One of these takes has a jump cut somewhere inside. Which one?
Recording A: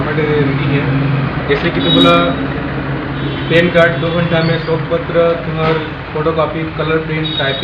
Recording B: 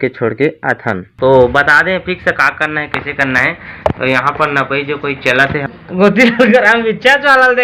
B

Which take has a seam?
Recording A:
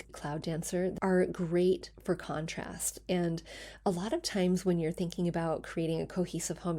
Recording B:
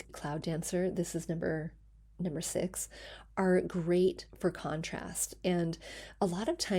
A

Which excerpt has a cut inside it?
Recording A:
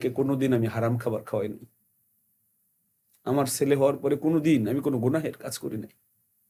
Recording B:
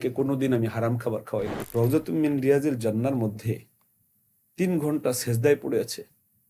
B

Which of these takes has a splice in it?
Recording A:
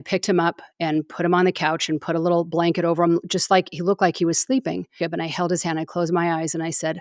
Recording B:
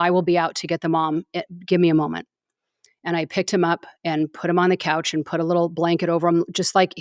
A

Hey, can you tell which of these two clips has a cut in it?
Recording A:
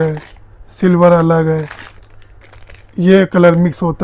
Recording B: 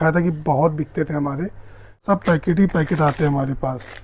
B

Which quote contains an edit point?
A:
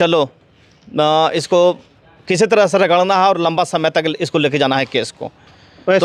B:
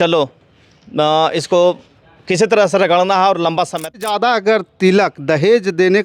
B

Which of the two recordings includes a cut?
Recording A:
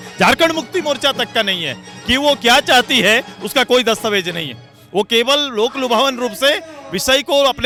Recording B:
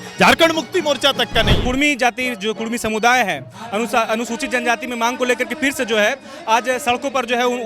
B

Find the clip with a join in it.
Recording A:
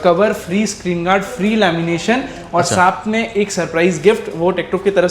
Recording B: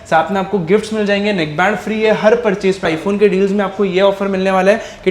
B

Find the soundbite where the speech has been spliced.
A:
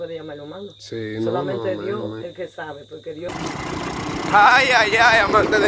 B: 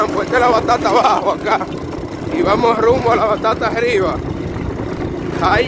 A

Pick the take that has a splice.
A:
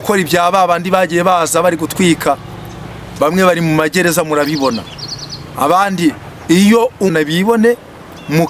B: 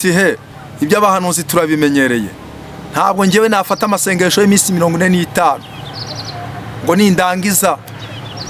A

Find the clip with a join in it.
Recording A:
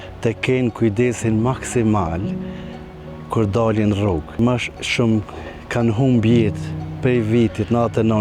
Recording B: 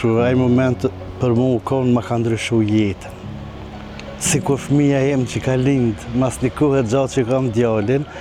A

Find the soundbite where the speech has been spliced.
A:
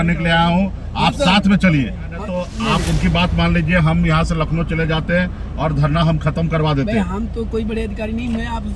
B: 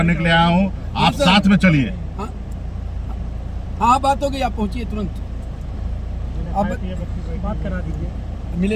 A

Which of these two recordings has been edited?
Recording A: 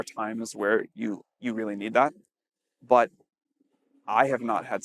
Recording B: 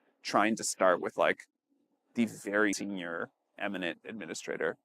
B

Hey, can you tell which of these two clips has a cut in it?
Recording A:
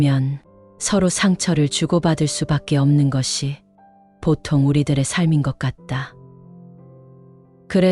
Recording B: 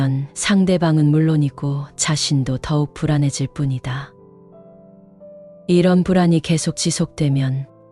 B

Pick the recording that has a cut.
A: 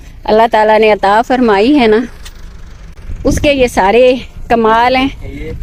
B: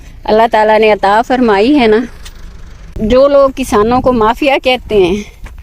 B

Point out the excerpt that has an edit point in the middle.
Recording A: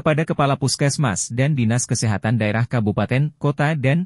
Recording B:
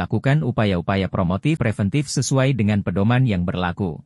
B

